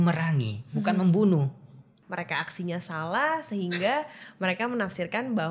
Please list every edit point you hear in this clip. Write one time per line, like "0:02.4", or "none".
0:01.9